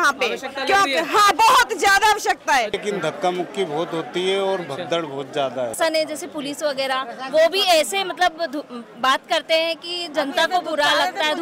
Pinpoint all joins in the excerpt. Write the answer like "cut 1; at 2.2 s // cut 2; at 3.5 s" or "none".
cut 1; at 2.8 s // cut 2; at 5.8 s